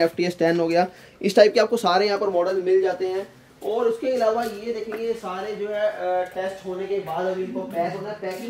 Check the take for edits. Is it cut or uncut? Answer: uncut